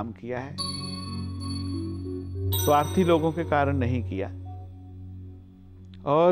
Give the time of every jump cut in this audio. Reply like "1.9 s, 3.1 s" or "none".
none